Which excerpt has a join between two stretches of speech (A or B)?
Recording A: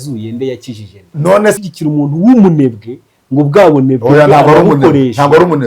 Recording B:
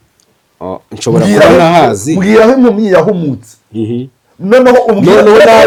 A